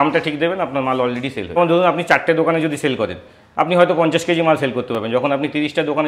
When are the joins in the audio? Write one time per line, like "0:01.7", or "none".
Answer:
0:01.6